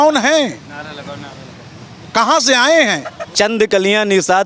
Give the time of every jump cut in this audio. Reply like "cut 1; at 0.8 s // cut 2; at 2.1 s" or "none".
cut 1; at 3.2 s